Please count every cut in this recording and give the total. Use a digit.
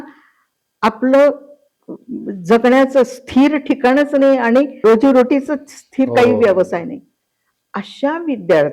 1